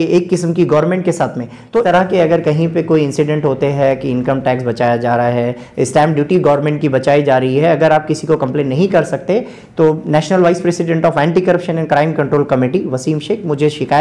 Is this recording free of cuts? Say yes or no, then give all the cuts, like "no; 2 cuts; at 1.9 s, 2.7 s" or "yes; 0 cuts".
no; 1 cut; at 1.8 s